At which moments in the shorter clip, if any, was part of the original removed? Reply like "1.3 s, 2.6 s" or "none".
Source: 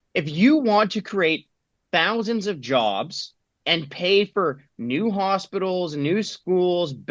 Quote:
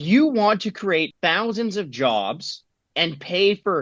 1.1 s